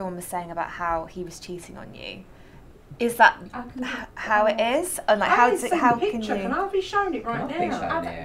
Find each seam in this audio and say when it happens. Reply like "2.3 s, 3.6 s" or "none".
none